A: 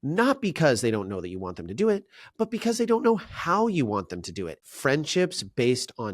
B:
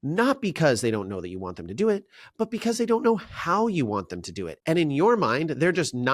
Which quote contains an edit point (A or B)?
A